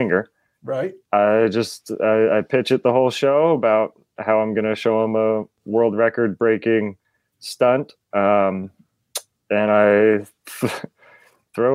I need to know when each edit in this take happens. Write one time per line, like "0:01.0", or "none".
0:01.0